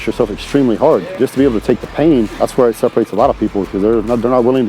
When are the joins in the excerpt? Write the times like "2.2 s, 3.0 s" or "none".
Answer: 1.1 s, 2.3 s